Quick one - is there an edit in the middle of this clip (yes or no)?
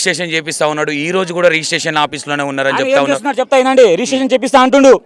no